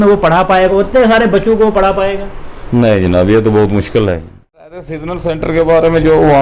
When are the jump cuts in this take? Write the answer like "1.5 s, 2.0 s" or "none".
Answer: 4.9 s